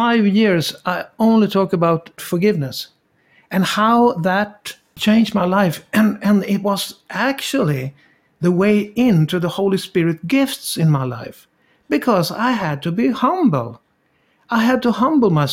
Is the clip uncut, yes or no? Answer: no